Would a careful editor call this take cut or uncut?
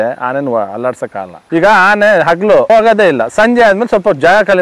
cut